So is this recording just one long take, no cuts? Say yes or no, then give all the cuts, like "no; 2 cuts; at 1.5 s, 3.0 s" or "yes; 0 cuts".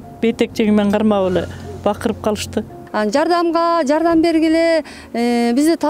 no; 1 cut; at 2.8 s